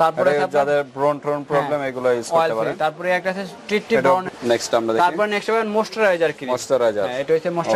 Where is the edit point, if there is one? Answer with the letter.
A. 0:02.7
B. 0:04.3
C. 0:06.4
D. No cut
B